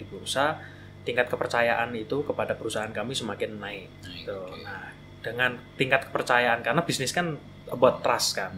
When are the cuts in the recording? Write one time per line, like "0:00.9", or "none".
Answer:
none

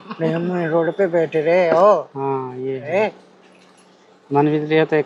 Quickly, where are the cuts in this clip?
none

